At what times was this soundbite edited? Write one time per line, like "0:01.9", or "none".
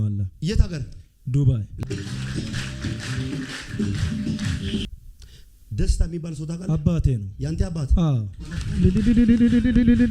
0:04.9